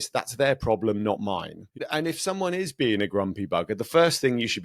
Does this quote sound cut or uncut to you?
cut